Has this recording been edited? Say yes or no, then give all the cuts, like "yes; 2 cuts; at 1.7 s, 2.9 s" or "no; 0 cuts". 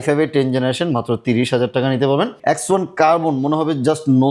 yes; 1 cut; at 2.4 s